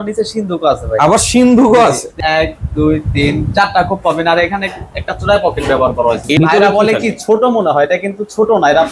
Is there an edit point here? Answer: yes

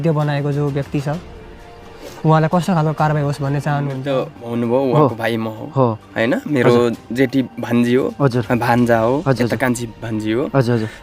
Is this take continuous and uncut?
no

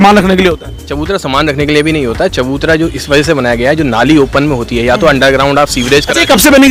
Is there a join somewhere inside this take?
no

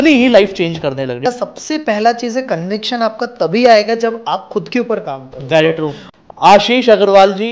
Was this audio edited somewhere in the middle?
yes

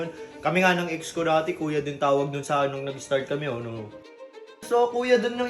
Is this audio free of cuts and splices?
no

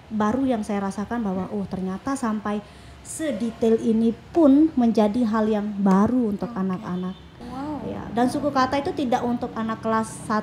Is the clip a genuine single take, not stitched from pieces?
no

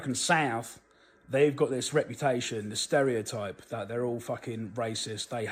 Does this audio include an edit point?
no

